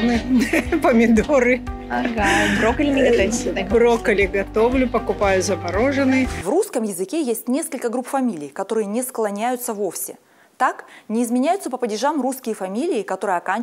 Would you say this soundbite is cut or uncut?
cut